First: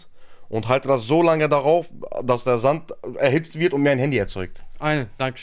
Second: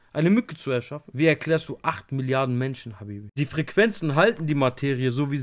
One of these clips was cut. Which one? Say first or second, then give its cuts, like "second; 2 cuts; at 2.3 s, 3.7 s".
second; 2 cuts; at 1.0 s, 3.2 s